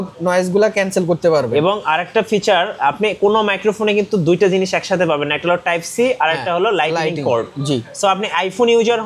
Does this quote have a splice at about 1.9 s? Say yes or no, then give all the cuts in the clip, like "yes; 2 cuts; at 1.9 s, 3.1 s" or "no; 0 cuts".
no; 0 cuts